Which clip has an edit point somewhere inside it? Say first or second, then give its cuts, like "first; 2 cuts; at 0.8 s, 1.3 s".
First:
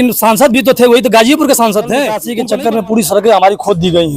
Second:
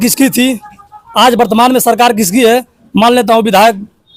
first; 1 cut; at 2.3 s